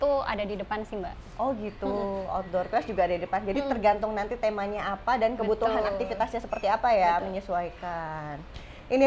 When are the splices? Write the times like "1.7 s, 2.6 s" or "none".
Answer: none